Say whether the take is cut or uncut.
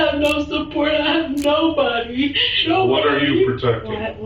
cut